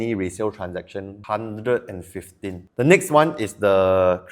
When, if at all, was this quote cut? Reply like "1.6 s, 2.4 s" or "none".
1.2 s, 2.7 s